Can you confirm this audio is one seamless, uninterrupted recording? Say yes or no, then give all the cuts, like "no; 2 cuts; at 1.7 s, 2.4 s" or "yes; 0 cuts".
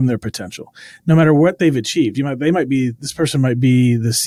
yes; 0 cuts